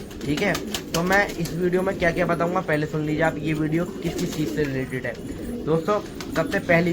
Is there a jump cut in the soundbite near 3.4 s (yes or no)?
no